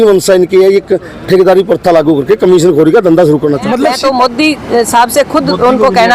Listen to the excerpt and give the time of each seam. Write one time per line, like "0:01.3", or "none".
0:03.9

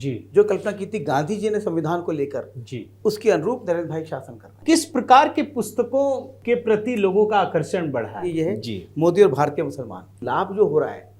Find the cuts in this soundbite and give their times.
0:04.6
0:06.3
0:08.2
0:10.1

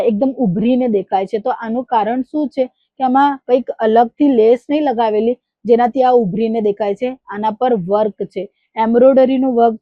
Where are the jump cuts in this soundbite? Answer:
none

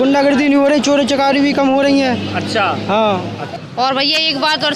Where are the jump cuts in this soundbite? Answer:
0:03.5

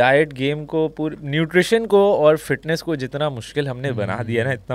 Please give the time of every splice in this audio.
none

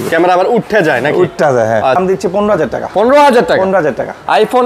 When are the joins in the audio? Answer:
0:02.0

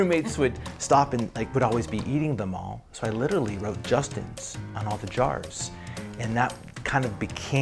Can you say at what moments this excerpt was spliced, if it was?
none

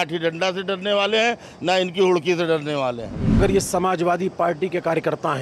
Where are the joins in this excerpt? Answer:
0:03.4

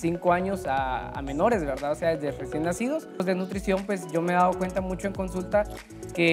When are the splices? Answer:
0:03.2

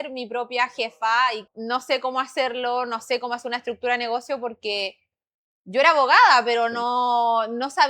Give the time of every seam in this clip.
0:01.4

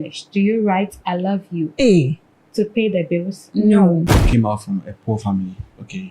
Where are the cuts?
0:01.7
0:04.2

